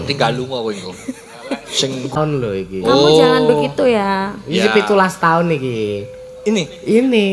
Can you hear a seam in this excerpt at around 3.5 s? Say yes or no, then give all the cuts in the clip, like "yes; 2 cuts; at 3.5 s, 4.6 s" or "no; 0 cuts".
no; 1 cut; at 2.1 s